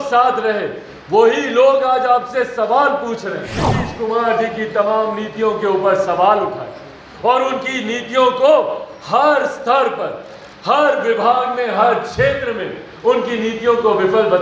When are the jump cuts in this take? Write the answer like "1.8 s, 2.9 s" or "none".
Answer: 3.8 s

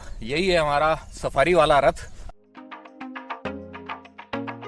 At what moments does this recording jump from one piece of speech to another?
2.1 s

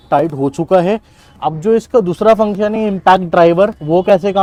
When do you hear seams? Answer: none

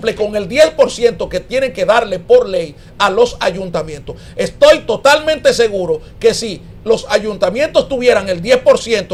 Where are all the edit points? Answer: none

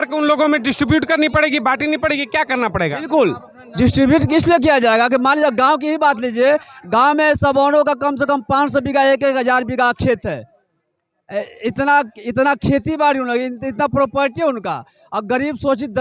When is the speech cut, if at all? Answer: none

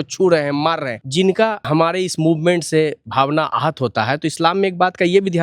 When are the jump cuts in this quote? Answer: 1.0 s, 1.6 s

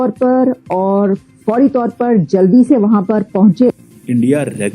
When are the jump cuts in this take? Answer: 3.8 s

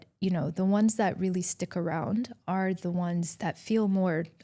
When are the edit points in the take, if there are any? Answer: 3.3 s

